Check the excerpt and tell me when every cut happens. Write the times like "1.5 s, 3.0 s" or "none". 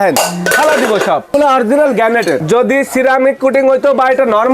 1.3 s, 2.4 s